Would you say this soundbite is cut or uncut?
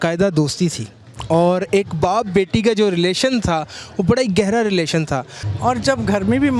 uncut